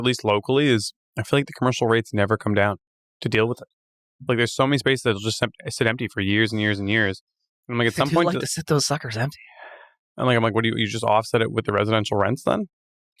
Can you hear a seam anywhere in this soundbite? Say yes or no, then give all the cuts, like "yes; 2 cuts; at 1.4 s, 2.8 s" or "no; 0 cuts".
no; 0 cuts